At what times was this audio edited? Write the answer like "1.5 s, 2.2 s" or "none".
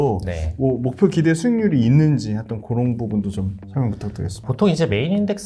4.4 s